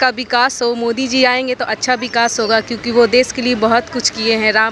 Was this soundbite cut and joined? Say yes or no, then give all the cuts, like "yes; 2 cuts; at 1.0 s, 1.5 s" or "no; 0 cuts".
no; 0 cuts